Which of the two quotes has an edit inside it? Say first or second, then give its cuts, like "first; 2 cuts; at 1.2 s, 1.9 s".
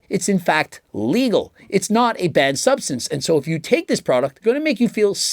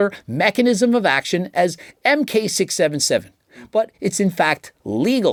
first; 1 cut; at 4.3 s